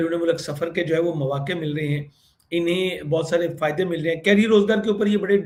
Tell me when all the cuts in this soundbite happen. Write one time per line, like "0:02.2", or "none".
none